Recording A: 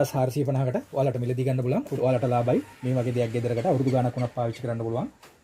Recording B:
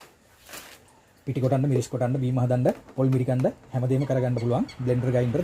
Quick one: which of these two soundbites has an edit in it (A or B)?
A